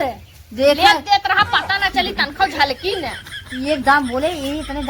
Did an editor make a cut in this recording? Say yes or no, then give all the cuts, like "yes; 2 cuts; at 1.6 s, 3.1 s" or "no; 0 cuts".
no; 0 cuts